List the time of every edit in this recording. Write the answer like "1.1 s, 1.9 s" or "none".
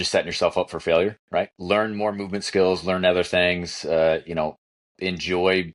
1.6 s

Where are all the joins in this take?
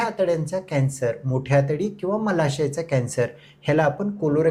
none

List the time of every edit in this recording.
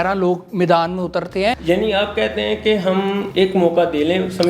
1.6 s, 3.3 s

